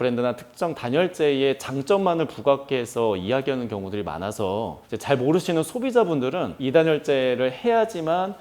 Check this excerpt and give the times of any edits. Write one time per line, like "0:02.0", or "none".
0:06.5